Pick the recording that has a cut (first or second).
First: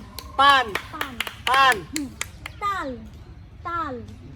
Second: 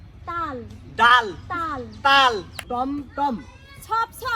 second